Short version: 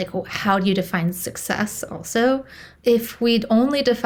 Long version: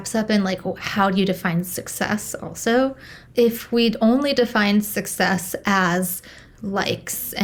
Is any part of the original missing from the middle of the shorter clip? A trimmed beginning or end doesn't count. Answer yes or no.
no